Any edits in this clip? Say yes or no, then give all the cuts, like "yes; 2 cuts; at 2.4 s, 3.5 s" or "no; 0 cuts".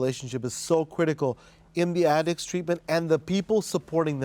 no; 0 cuts